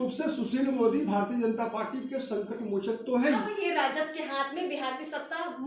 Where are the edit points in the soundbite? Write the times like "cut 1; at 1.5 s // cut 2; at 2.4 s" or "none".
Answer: cut 1; at 3.5 s